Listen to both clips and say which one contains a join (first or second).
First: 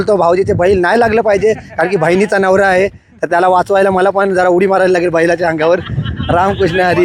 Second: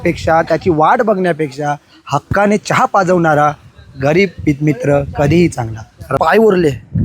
second